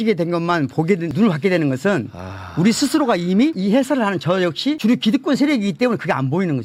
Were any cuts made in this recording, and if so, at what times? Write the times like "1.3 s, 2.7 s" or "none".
none